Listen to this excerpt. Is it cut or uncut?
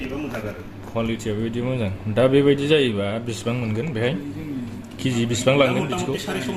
uncut